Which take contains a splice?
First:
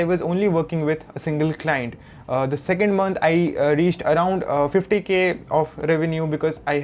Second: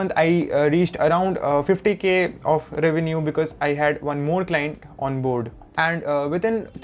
second; 1 cut; at 5.6 s

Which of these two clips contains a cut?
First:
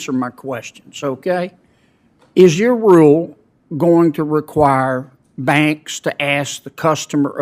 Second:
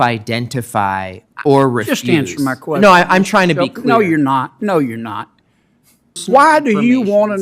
second; 1 cut; at 6.2 s

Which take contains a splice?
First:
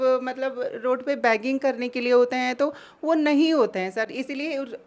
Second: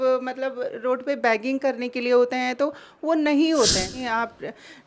second; 1 cut; at 3.9 s

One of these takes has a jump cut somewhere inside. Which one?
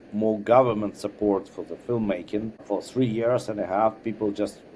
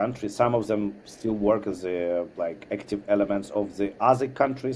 first; 1 cut; at 2.6 s

